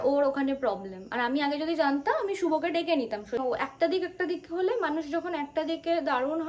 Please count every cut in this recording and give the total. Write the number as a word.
one